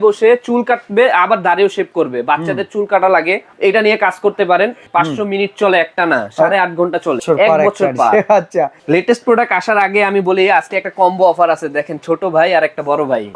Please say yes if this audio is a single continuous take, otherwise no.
no